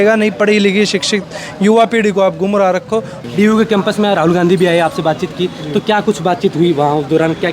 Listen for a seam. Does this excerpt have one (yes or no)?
yes